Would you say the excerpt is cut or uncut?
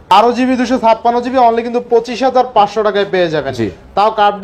uncut